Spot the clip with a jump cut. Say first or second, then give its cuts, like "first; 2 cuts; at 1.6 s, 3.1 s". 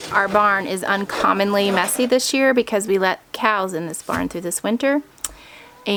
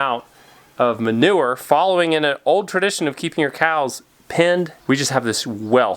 second; 1 cut; at 4.8 s